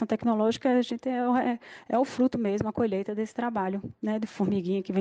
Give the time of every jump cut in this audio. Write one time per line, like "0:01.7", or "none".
none